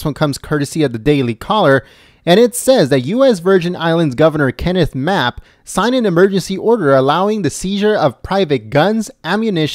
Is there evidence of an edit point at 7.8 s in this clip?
no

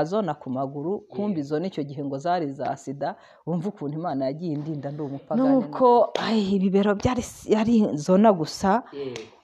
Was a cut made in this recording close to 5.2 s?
yes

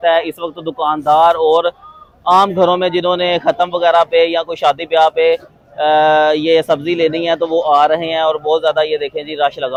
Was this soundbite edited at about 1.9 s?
no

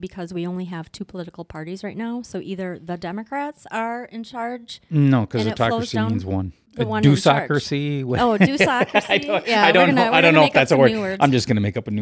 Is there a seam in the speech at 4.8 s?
no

